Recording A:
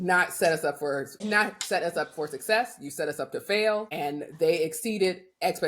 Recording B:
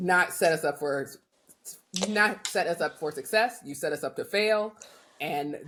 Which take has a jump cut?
A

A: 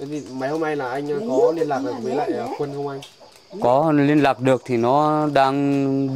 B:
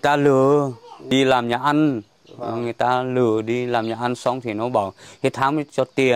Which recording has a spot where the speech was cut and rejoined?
B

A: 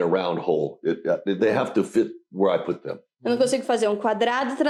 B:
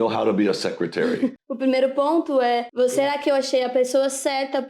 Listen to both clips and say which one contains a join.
B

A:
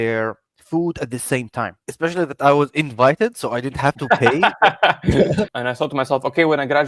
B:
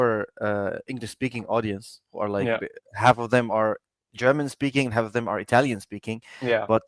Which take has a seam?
A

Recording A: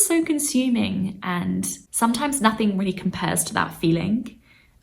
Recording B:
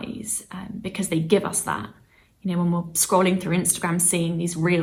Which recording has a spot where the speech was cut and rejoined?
A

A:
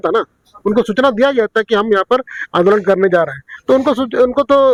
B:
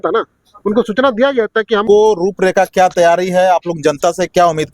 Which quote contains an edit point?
B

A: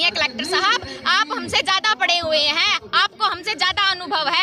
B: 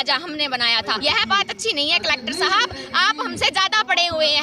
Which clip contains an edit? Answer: B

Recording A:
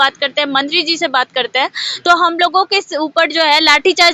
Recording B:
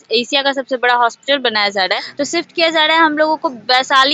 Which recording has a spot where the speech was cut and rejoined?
B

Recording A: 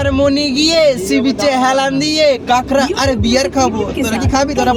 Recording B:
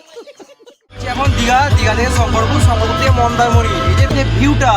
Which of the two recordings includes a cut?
B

